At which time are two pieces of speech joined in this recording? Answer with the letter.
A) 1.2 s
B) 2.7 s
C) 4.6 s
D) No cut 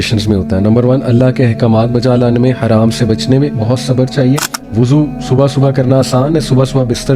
C